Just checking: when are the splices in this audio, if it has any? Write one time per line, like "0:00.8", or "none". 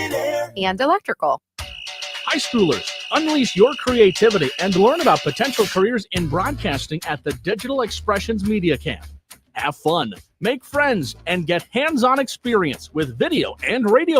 0:01.6